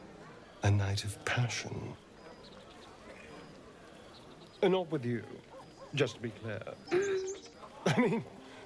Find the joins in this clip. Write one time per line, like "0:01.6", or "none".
none